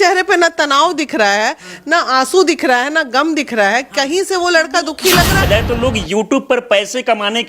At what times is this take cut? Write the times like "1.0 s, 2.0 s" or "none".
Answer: 5.4 s